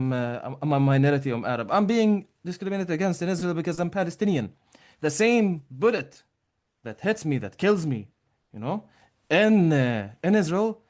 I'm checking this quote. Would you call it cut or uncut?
uncut